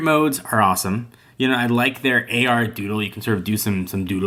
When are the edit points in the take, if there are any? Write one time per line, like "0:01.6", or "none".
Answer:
none